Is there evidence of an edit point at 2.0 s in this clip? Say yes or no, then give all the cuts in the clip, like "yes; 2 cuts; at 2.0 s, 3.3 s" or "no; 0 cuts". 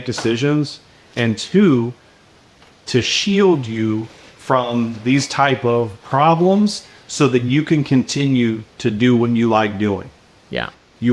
no; 0 cuts